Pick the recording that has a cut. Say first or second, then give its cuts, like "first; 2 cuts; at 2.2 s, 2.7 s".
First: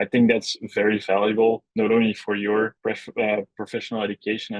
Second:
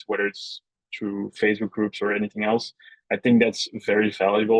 first; 1 cut; at 2.8 s